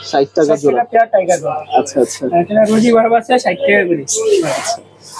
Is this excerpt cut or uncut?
uncut